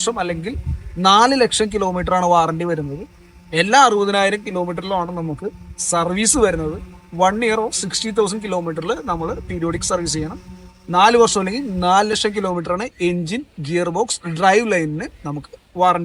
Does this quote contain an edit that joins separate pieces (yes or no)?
no